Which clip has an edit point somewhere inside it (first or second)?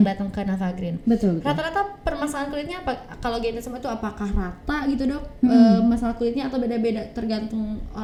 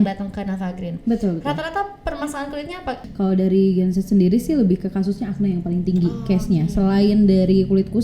second